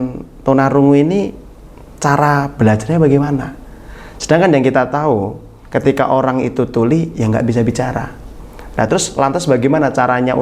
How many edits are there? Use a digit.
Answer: 1